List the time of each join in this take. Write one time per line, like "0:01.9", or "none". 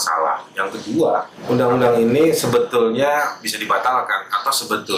0:01.3

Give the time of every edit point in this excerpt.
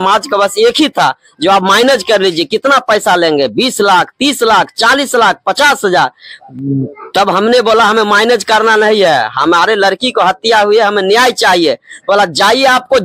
none

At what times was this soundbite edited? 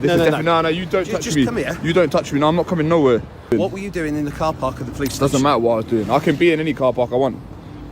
0:03.5

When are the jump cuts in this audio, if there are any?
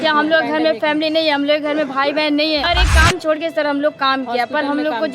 0:02.6

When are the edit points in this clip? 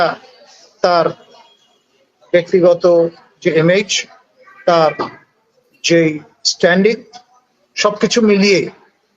none

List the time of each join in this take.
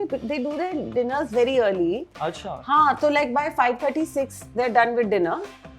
none

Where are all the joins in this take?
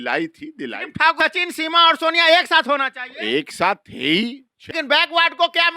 0:01.2
0:04.7

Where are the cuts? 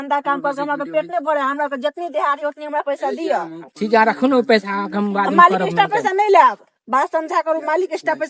none

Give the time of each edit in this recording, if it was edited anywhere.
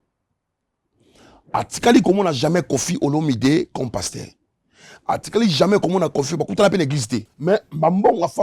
0:07.3

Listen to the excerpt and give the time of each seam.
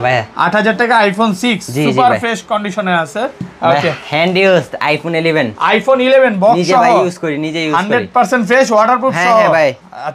none

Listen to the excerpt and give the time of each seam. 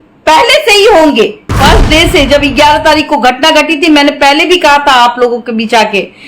0:01.6

